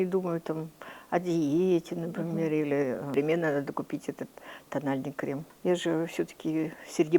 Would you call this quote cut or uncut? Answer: cut